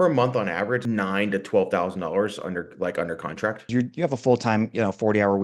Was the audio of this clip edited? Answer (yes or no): yes